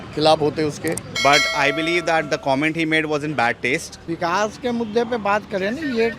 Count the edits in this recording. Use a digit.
2